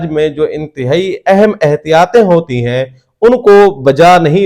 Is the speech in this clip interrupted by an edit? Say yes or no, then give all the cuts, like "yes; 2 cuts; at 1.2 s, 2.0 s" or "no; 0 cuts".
no; 0 cuts